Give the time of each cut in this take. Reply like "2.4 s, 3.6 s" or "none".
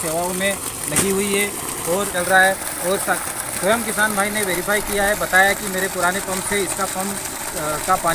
2.1 s

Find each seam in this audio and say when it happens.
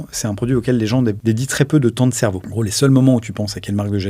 1.2 s, 2.5 s

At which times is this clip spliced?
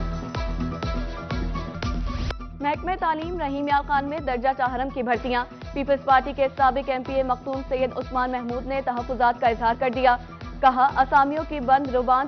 none

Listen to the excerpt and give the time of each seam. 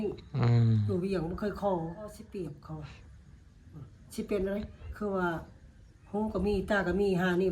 2.2 s

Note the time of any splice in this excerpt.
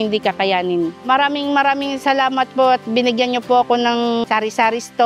1.0 s

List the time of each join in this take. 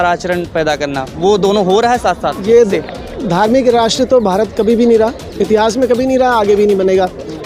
2.7 s

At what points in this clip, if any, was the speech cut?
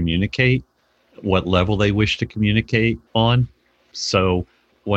3.0 s

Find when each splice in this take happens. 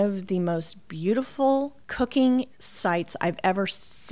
1.8 s, 2.6 s

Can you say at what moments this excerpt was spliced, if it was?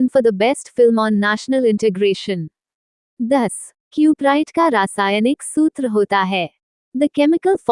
3.3 s

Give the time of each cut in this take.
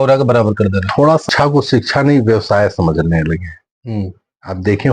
1.2 s

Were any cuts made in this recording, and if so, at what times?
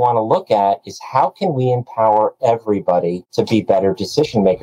3.2 s

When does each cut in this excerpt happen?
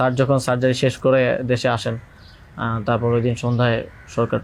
none

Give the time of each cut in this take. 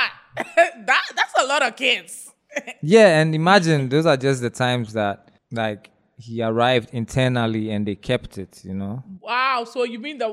5.3 s, 9.1 s

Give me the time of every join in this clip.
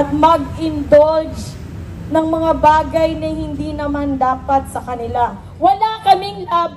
5.4 s

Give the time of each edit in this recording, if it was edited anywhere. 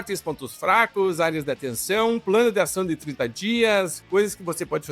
4.0 s

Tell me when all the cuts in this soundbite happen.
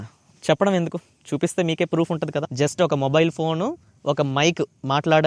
2.5 s

